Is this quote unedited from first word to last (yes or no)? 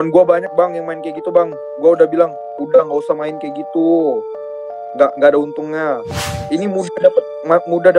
no